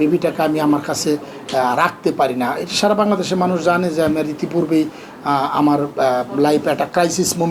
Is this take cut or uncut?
uncut